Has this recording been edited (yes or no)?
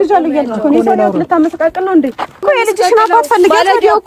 yes